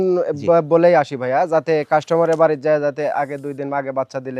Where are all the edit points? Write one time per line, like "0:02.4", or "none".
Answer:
none